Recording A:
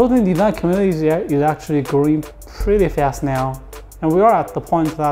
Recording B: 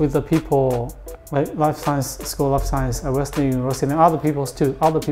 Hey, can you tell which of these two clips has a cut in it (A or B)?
B